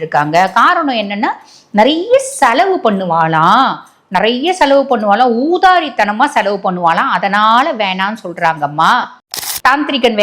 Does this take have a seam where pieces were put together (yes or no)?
yes